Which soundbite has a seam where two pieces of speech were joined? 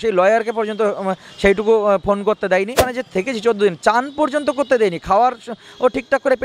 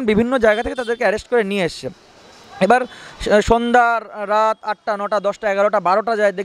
first; 1 cut; at 2.9 s

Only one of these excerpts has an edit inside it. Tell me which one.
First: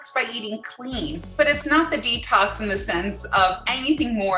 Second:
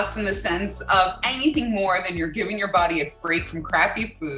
first; 1 cut; at 1.2 s

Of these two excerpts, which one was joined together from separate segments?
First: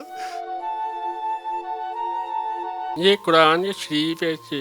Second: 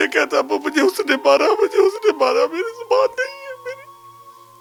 first; 1 cut; at 2.8 s

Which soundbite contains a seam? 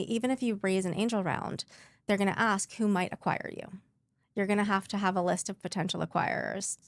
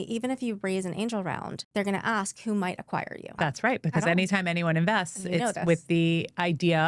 second; 2 cuts; at 1.5 s, 3.3 s

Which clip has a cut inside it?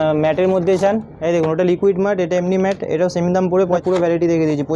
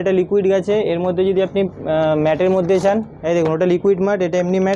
first; 1 cut; at 3.8 s

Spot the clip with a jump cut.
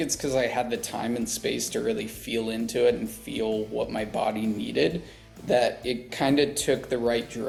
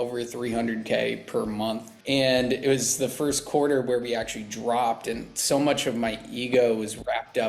second; 1 cut; at 1.9 s

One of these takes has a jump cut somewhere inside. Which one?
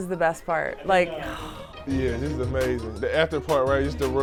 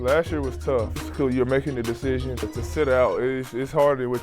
second; 2 cuts; at 0.9 s, 2.4 s

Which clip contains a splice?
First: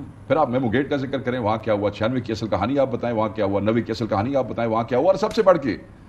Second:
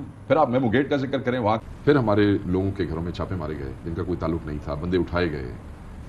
second; 1 cut; at 1.6 s

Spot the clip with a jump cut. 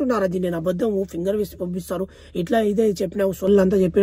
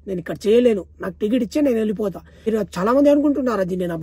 second; 1 cut; at 2.5 s

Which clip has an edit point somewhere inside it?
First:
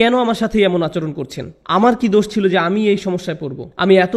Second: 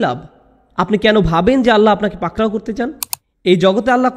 second; 1 cut; at 3.1 s

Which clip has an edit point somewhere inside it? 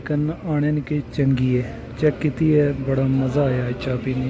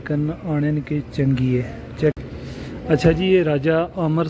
second; 1 cut; at 2.2 s

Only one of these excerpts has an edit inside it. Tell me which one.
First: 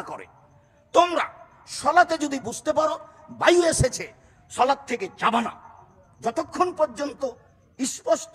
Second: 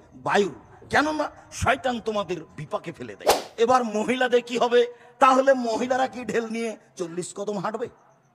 second; 1 cut; at 3.4 s

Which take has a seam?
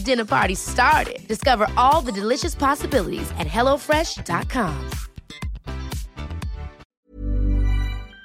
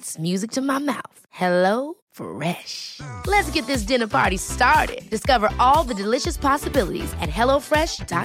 first; 1 cut; at 6.9 s

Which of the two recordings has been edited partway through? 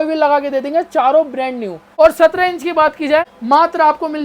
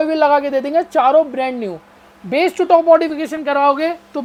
first; 2 cuts; at 1.8 s, 3.3 s

